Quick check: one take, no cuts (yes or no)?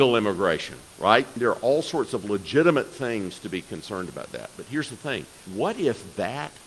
no